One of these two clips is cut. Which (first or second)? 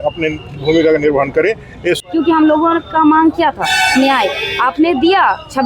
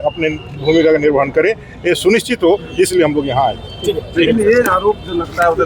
first